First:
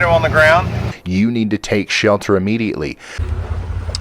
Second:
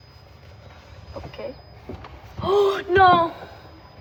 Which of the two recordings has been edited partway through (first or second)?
first